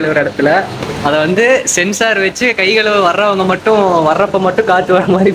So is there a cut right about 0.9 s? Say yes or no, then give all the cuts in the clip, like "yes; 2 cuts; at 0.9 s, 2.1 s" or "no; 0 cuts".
yes; 1 cut; at 0.9 s